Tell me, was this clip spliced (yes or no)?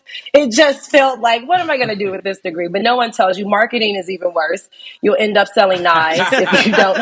no